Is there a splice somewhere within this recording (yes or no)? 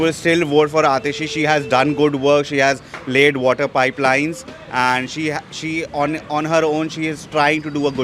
no